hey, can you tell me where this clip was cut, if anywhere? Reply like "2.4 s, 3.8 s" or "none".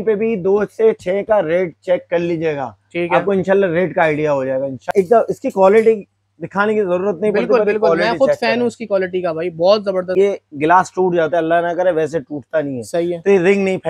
4.9 s, 10.1 s